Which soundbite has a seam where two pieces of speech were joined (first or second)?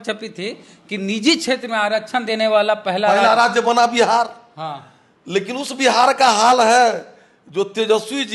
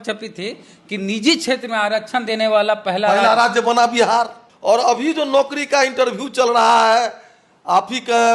second